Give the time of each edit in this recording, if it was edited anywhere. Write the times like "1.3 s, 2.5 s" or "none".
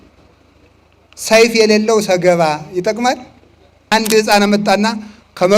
3.8 s